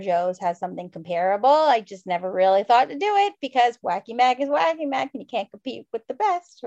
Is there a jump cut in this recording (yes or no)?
no